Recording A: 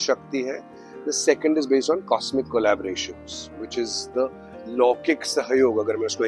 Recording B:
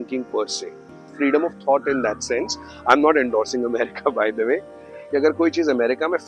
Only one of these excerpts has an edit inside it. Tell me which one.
B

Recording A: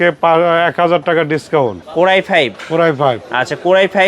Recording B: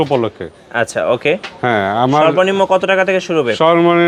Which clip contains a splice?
A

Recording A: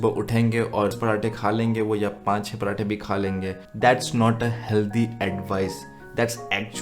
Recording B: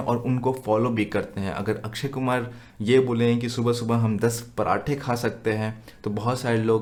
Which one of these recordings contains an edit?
A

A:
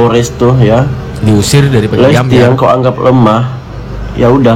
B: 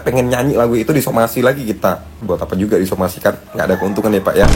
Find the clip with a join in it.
B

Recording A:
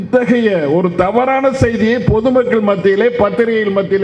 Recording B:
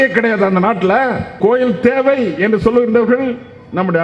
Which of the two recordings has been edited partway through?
B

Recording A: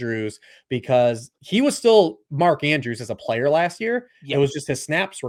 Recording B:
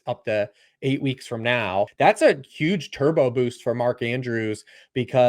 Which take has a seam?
B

